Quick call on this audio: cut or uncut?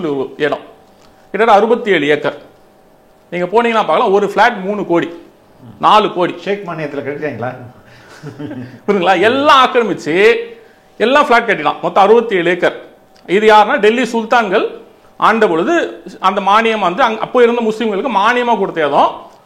uncut